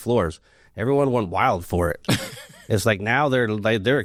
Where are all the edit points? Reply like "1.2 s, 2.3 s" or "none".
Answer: none